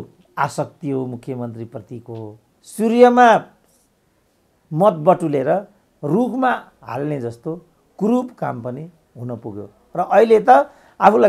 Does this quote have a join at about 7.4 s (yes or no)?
no